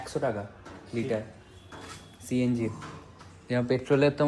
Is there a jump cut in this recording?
no; 0 cuts

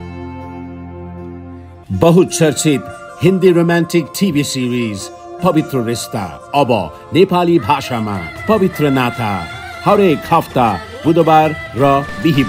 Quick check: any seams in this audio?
no; 0 cuts

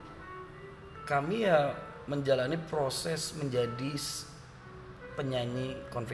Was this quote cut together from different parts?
no; 0 cuts

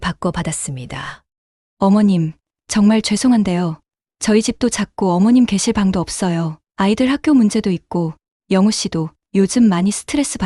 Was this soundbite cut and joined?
no; 0 cuts

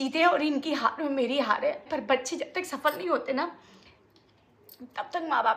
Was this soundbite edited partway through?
yes; 1 cut; at 1.9 s

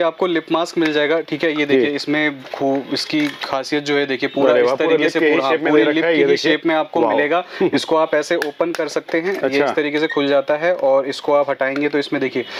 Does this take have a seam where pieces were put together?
no; 0 cuts

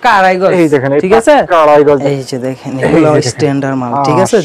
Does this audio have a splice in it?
yes; 1 cut; at 2.1 s

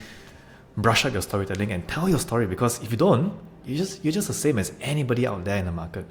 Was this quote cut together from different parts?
no; 0 cuts

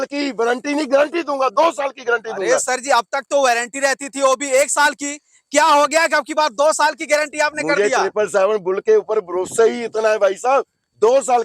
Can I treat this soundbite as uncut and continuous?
yes; 0 cuts

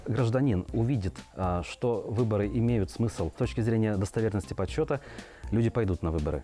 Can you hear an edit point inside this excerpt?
no; 0 cuts

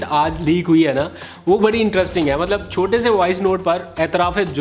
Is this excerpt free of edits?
yes; 0 cuts

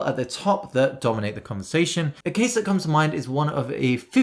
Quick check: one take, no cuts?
yes; 0 cuts

